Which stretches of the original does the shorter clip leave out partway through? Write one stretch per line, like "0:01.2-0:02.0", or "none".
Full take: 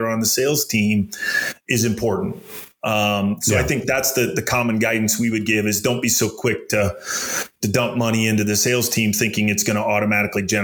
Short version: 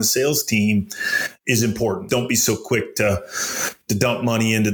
0:02.3-0:05.8